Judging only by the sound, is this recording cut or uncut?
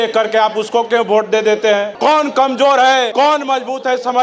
cut